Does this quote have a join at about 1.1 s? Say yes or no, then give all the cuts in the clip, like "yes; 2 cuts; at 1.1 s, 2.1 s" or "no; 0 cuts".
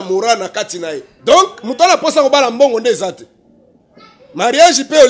yes; 1 cut; at 1.1 s